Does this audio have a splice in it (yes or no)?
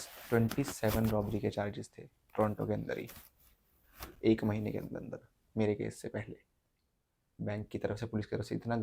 yes